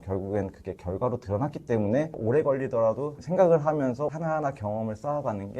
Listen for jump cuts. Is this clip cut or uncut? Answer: cut